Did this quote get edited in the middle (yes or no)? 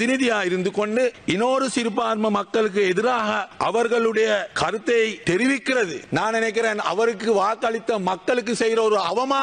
yes